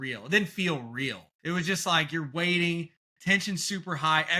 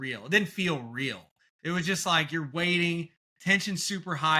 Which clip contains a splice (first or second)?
first